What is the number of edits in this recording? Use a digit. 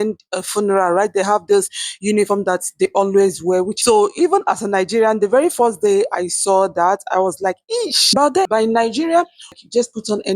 3